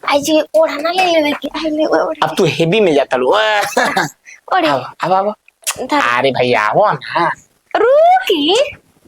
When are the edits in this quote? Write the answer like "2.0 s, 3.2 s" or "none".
1.4 s